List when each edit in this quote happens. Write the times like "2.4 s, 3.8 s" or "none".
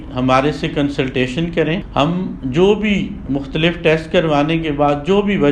1.8 s